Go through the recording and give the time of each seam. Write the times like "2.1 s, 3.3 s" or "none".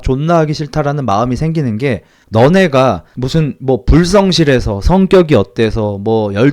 2.1 s, 3.1 s